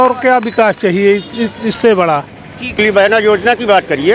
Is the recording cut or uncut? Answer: cut